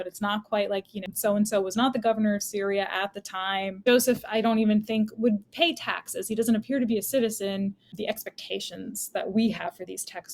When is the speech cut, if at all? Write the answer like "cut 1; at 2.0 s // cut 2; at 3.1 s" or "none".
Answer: cut 1; at 1.0 s // cut 2; at 3.8 s // cut 3; at 7.9 s